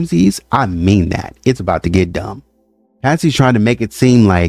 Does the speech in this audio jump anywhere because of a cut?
yes; 1 cut; at 3.0 s

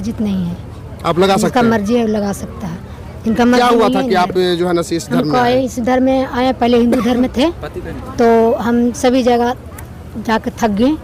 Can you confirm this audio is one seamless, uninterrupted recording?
yes; 0 cuts

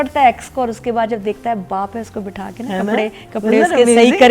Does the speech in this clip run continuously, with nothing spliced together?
yes; 0 cuts

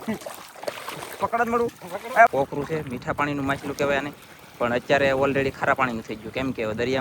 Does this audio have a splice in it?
yes; 1 cut; at 2.3 s

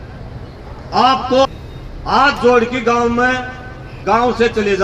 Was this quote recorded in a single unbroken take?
no; 1 cut; at 1.5 s

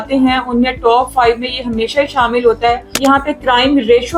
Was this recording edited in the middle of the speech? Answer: yes; 1 cut; at 2.9 s

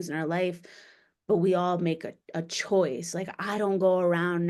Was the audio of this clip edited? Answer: no; 0 cuts

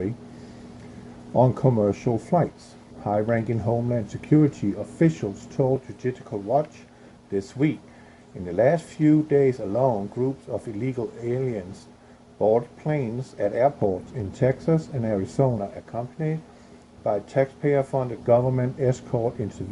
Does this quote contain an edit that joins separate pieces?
yes; 1 cut; at 14.6 s

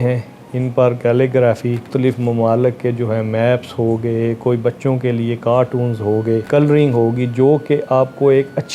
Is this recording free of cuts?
no; 2 cuts; at 1.9 s, 6.4 s

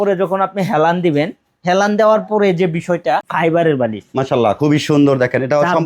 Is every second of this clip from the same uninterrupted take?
no; 1 cut; at 3.3 s

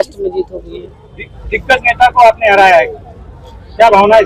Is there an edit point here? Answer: no; 0 cuts

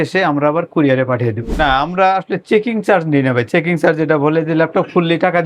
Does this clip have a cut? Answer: yes; 1 cut; at 1.6 s

